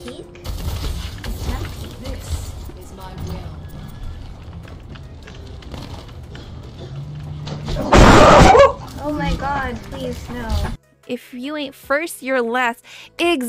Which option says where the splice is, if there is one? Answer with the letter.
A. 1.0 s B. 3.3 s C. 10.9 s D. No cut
C